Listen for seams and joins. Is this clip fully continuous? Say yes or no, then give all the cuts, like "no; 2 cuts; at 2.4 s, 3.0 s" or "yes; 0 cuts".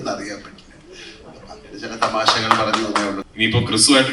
no; 1 cut; at 3.2 s